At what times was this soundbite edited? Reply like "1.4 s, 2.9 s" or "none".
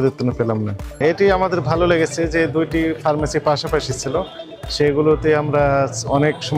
1.0 s